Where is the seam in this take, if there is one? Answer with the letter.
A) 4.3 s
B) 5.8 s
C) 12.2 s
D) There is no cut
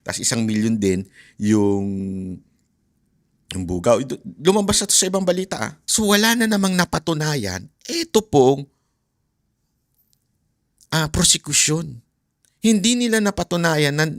B